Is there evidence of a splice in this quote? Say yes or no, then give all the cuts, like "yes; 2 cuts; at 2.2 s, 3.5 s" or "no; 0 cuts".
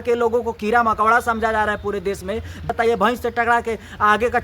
yes; 1 cut; at 2.7 s